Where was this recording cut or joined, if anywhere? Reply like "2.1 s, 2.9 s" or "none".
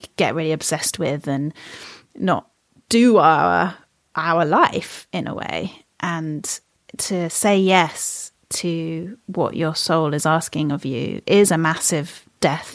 6.8 s